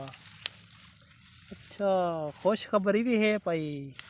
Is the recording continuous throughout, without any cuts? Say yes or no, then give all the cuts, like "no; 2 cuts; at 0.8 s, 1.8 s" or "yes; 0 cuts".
yes; 0 cuts